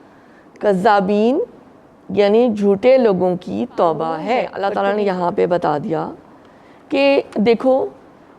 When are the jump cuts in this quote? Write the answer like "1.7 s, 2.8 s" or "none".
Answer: 4.5 s